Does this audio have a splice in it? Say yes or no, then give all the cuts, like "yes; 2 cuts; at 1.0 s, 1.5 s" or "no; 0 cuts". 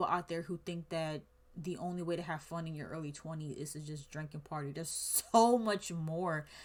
no; 0 cuts